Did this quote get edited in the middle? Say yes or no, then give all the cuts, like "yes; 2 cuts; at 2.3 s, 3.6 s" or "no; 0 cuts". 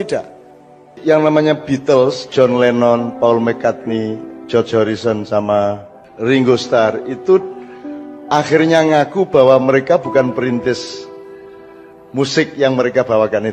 yes; 1 cut; at 0.9 s